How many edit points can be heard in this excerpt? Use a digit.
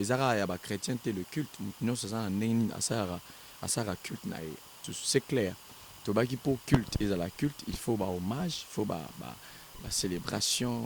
1